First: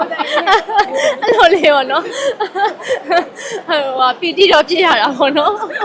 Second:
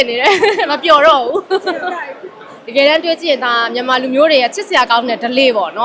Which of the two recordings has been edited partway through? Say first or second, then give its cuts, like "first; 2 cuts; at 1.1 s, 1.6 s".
second; 1 cut; at 2.5 s